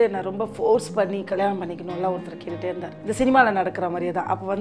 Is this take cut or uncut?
cut